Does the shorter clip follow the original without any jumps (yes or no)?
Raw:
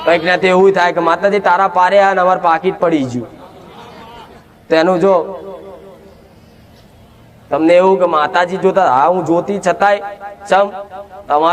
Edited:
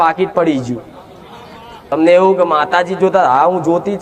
no